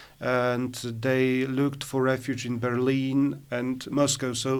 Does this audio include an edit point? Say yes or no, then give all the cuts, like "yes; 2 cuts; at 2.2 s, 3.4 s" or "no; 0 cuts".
no; 0 cuts